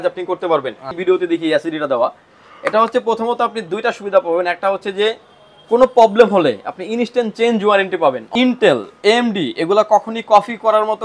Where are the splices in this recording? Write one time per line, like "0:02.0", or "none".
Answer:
0:01.0
0:08.3